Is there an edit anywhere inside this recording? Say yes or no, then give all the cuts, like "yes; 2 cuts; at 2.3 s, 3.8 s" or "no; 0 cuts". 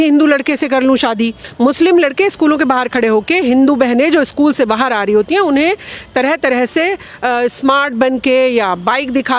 yes; 1 cut; at 1.4 s